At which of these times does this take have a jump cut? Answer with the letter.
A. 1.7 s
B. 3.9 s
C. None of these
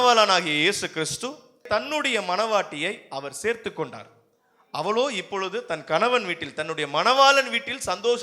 A